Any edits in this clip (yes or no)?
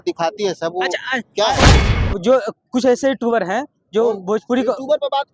yes